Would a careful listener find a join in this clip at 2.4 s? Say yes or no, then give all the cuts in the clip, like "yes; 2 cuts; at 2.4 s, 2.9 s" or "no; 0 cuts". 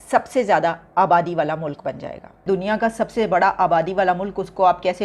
yes; 1 cut; at 2.4 s